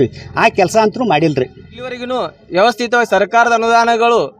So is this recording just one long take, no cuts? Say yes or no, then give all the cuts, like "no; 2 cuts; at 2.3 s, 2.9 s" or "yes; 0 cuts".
no; 1 cut; at 2.0 s